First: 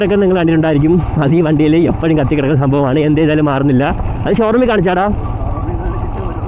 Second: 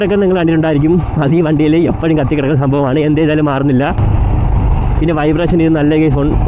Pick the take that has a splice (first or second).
second